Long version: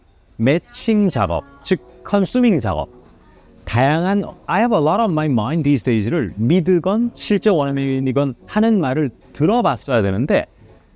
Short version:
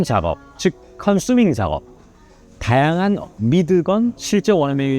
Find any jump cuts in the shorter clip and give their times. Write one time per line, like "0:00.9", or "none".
0:03.3